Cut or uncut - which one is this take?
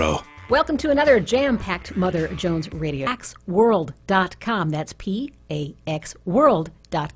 uncut